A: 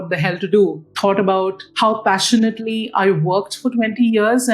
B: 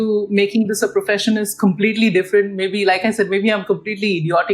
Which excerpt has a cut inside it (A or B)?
A